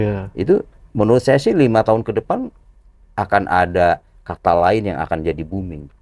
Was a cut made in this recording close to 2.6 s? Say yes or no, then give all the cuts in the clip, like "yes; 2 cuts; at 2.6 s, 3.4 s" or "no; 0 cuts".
no; 0 cuts